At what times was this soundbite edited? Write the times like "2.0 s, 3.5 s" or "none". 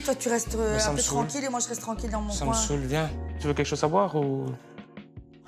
3.2 s